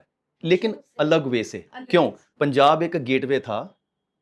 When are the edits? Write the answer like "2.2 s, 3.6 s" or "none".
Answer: none

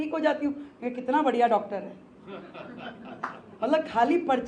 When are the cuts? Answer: none

